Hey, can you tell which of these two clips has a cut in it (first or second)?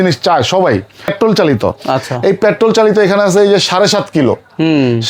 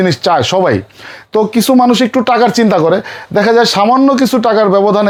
first